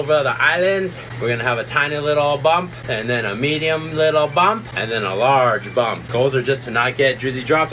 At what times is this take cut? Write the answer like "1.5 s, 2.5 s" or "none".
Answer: 1.0 s, 2.8 s, 4.7 s, 6.0 s